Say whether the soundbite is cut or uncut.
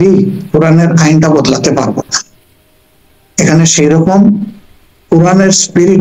uncut